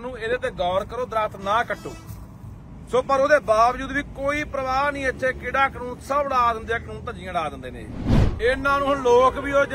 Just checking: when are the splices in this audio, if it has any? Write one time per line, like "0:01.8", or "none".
0:08.2

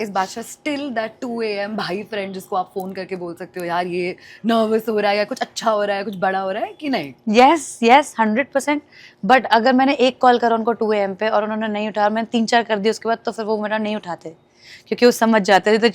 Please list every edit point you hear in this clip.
none

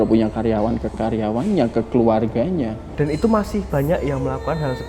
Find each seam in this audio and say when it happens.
0:02.8

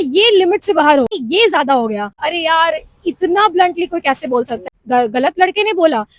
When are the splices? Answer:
0:01.2
0:02.2
0:04.6

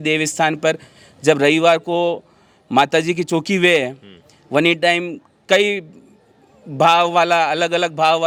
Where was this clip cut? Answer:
none

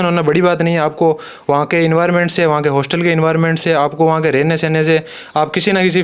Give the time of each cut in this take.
none

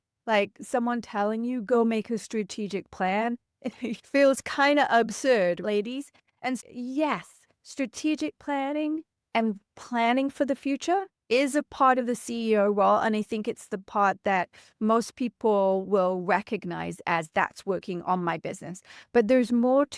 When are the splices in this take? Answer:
none

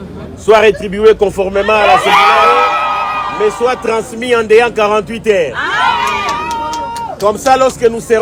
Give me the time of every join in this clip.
none

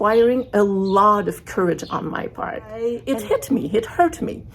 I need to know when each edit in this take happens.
0:02.9

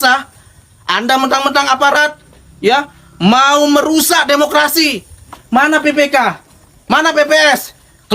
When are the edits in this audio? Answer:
0:05.3

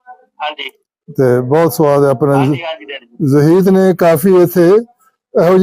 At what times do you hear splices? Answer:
none

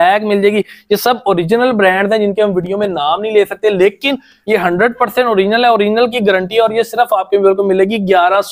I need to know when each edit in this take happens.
none

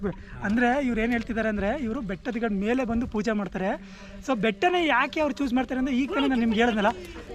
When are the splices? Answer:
none

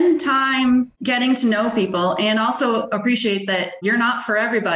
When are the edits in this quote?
0:01.0
0:03.8

